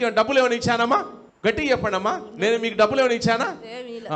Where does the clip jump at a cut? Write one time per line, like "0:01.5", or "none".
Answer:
0:01.2